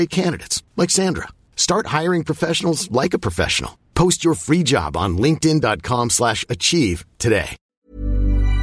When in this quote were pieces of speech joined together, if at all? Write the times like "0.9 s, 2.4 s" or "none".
7.7 s